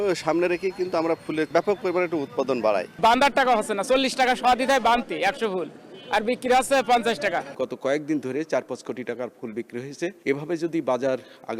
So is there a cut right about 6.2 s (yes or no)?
no